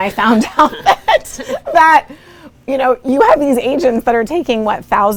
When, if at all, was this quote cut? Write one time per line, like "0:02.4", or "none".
none